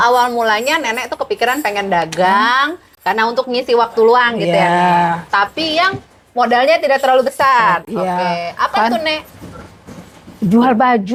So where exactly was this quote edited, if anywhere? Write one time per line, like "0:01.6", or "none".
none